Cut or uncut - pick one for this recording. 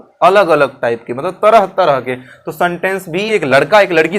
cut